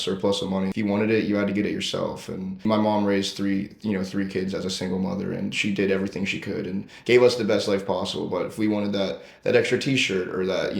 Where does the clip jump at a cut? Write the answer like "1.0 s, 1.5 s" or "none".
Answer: 0.7 s, 2.6 s